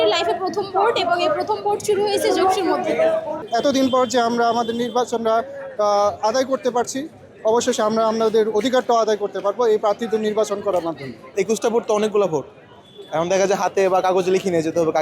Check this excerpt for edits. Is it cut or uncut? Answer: cut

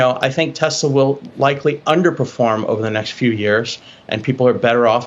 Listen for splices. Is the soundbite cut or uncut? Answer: uncut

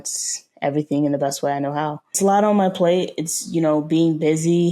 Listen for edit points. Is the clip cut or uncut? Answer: cut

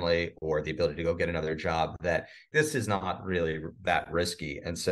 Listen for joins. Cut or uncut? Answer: cut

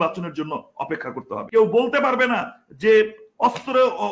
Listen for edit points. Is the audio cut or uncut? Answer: cut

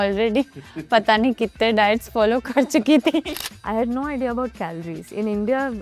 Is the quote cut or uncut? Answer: cut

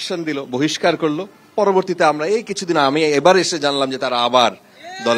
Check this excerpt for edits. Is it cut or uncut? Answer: uncut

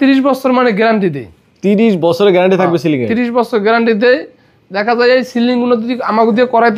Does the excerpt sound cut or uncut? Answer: uncut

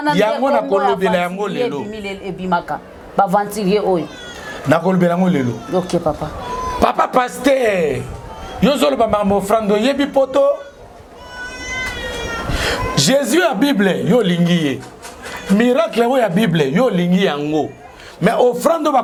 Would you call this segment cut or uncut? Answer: uncut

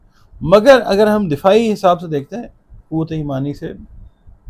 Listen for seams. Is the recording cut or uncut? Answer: uncut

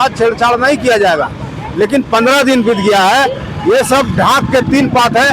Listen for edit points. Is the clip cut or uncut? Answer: uncut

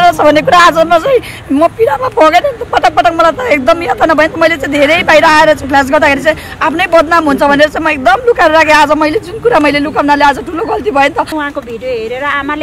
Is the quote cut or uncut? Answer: cut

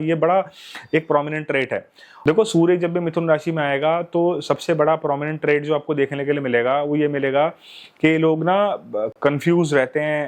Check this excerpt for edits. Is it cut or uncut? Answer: cut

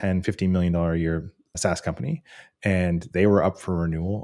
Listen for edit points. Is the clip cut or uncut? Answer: uncut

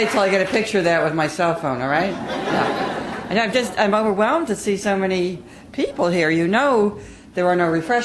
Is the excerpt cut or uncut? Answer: cut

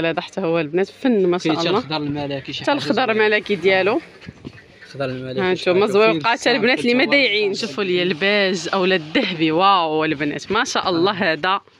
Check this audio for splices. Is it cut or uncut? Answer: cut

